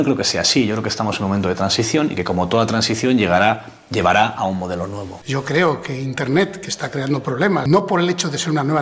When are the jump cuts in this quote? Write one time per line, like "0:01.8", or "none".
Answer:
0:05.2
0:07.7